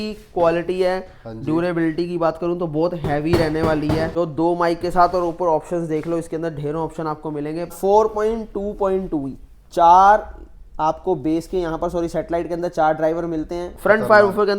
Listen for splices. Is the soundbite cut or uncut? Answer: cut